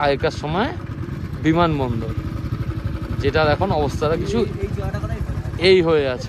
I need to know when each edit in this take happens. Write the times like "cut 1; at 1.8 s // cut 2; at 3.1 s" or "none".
none